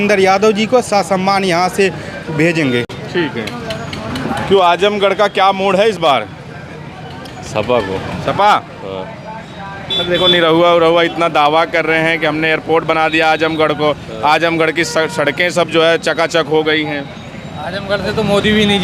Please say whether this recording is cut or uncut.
uncut